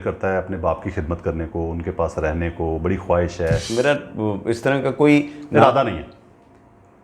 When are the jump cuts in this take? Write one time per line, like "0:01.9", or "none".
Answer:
0:03.7